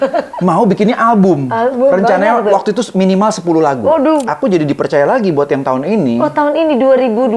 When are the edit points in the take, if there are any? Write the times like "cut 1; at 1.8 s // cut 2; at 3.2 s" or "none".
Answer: cut 1; at 4.2 s